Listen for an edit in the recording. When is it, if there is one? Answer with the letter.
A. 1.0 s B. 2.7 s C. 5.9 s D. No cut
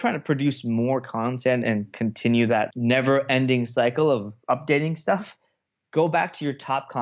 B